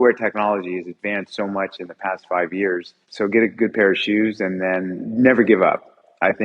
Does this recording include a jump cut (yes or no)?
yes